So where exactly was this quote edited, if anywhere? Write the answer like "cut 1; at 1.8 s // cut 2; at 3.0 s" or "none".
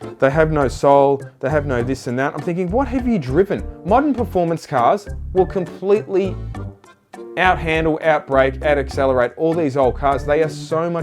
cut 1; at 1.3 s